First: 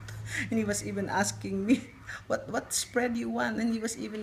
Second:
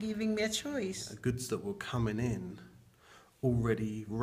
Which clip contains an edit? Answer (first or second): second